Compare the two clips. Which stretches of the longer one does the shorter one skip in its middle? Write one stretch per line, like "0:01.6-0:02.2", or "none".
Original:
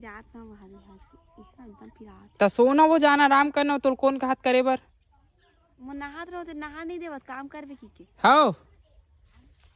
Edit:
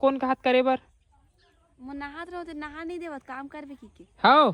none